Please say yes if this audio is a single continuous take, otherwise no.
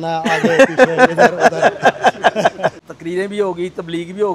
no